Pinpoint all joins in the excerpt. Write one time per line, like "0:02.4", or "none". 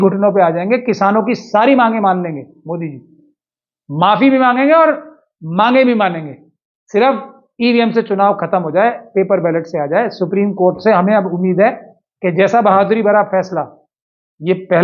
none